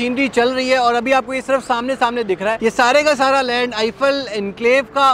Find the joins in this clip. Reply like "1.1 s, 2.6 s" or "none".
2.6 s